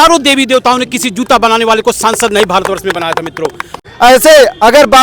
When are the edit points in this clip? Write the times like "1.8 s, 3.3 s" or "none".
3.8 s